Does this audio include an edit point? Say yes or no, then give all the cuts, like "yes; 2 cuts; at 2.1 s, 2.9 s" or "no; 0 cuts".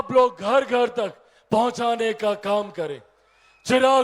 no; 0 cuts